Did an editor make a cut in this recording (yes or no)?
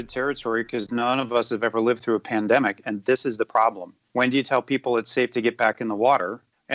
no